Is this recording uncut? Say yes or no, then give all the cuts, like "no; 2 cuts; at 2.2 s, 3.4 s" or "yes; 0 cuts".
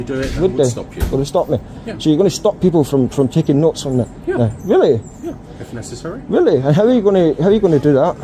no; 1 cut; at 2.7 s